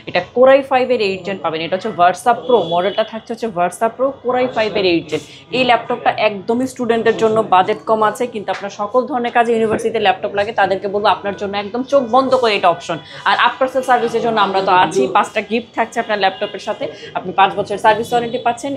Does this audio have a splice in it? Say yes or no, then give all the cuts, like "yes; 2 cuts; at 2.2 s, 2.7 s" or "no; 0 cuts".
no; 0 cuts